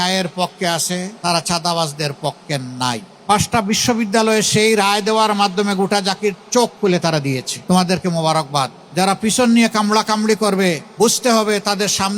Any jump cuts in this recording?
yes; 5 cuts; at 1.1 s, 3.1 s, 7.5 s, 8.8 s, 10.9 s

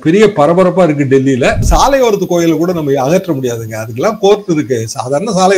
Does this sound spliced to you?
yes; 1 cut; at 1.6 s

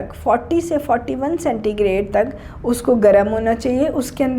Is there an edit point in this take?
no; 0 cuts

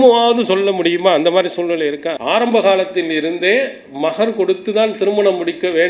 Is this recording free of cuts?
no; 1 cut; at 2.2 s

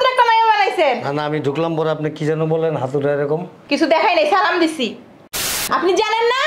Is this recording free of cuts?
no; 1 cut; at 5.5 s

